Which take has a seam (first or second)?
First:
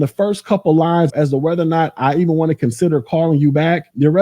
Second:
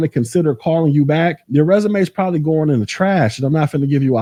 first